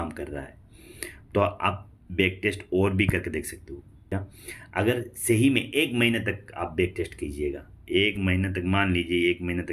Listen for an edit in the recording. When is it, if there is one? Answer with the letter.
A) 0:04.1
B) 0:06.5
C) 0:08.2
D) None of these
A